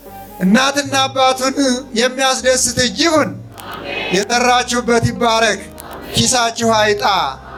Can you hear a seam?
no; 0 cuts

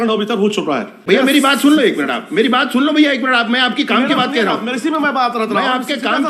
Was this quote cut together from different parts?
yes; 1 cut; at 1.0 s

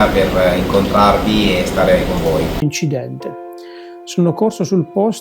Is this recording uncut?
no; 1 cut; at 2.6 s

